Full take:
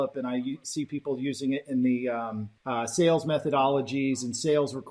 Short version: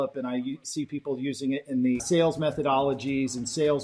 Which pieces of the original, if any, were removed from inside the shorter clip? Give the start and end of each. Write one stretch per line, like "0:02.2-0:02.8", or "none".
0:02.0-0:02.9